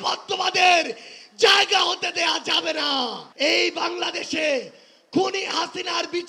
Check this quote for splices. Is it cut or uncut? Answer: cut